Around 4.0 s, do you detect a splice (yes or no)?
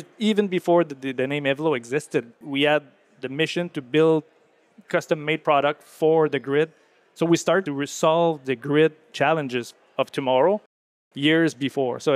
no